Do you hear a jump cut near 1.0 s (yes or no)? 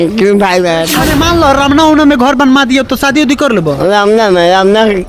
yes